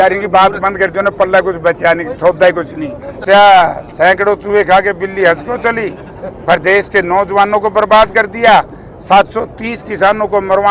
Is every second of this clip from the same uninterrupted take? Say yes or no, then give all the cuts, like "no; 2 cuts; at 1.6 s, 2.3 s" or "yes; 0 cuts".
no; 1 cut; at 3.2 s